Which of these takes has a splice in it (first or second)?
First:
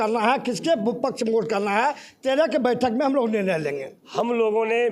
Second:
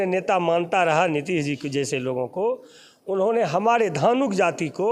first